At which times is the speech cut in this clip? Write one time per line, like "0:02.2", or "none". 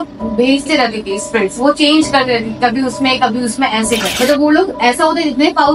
0:04.1